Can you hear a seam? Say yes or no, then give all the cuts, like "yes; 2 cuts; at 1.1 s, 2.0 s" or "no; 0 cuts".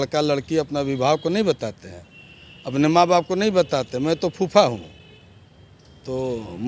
no; 0 cuts